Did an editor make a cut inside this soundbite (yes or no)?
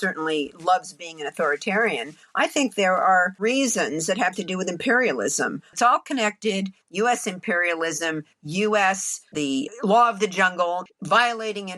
yes